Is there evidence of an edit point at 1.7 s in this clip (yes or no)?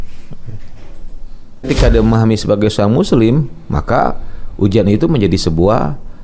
yes